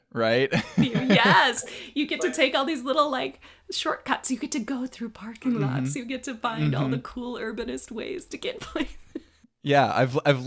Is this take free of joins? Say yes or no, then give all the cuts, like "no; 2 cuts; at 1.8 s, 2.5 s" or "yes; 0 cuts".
yes; 0 cuts